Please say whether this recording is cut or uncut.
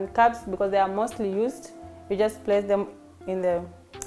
uncut